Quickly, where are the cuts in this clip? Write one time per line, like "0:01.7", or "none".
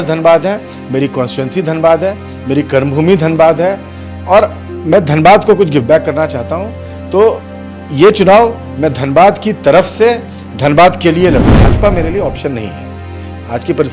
0:11.7